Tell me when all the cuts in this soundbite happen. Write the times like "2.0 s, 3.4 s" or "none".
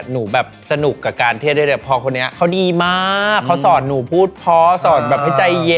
2.3 s